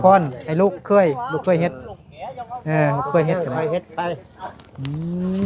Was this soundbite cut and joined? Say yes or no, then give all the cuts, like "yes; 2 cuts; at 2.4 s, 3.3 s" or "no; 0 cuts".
no; 0 cuts